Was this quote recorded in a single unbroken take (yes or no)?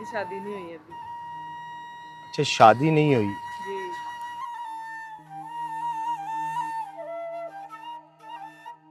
yes